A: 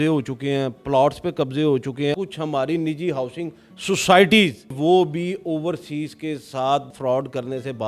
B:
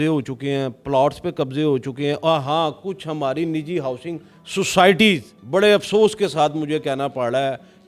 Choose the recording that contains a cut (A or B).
A